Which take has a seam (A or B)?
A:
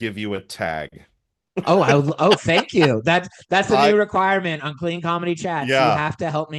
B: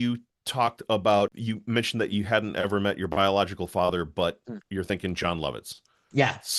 B